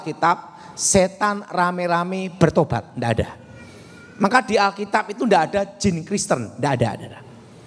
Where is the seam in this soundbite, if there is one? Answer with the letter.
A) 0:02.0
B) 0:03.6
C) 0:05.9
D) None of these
D